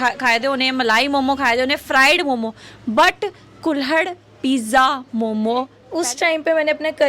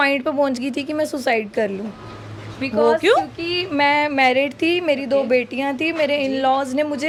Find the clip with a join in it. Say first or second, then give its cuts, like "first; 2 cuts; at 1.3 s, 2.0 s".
first; 1 cut; at 5.8 s